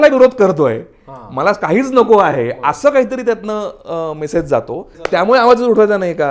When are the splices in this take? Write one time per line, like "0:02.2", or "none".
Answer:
0:05.0

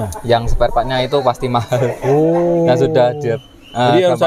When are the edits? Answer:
none

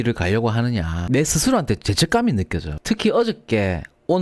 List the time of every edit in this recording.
0:01.0

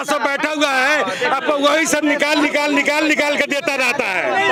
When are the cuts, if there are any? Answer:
none

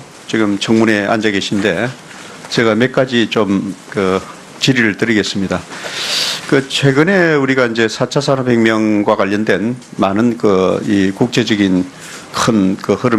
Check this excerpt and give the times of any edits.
0:05.3

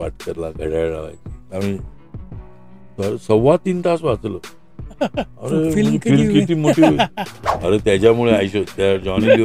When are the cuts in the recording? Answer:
0:05.3
0:07.5

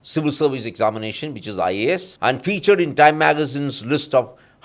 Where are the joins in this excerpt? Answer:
0:02.1

